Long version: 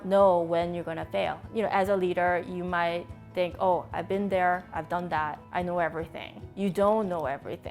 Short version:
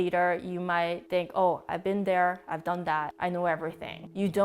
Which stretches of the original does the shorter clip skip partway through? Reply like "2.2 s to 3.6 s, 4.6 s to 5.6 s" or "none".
3.0 s to 3.2 s, 5.7 s to 5.9 s